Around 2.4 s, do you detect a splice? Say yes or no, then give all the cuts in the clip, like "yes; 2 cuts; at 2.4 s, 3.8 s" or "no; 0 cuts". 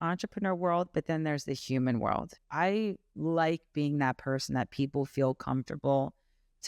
yes; 1 cut; at 2.4 s